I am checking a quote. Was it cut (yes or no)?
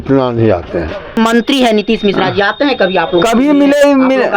yes